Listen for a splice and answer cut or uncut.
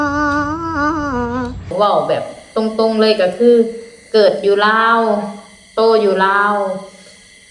cut